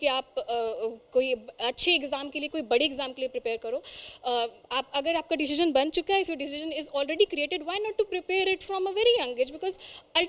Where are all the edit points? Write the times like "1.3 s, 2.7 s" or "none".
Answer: none